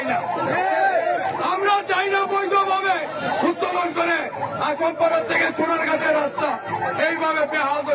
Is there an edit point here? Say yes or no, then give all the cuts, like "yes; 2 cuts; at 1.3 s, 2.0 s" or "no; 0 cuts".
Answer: no; 0 cuts